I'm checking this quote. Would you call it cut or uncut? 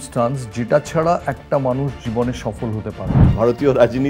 cut